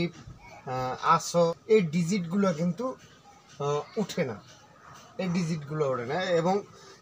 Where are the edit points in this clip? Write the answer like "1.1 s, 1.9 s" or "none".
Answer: 1.5 s